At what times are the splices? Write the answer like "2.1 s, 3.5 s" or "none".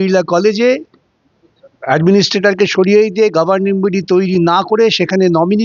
none